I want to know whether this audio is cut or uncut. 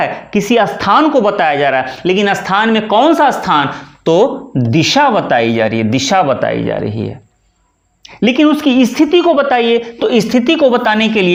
uncut